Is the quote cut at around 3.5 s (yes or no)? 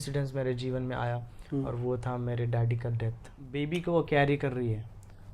yes